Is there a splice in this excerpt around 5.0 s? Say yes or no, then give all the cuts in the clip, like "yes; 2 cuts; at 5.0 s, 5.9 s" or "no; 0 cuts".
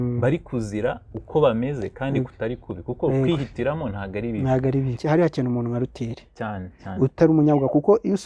yes; 1 cut; at 5.0 s